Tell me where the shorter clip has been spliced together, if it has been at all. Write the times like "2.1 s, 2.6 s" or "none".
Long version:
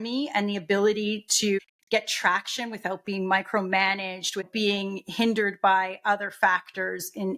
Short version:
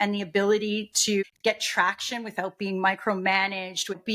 1.3 s